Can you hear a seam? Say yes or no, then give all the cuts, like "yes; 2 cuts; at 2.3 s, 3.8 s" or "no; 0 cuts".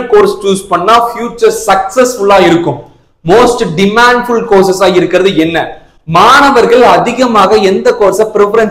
no; 0 cuts